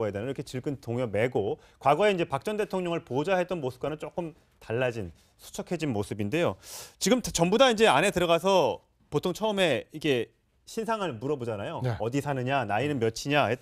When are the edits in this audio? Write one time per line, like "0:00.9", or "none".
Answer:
0:02.2